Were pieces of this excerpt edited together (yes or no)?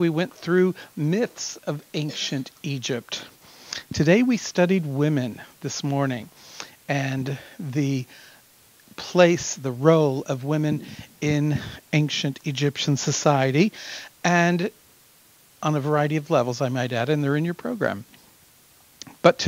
yes